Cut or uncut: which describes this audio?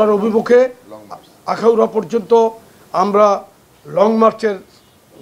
uncut